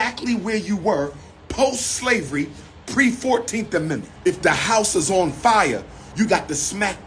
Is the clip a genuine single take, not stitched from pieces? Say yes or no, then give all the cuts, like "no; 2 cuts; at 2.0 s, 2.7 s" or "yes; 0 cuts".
no; 1 cut; at 4.1 s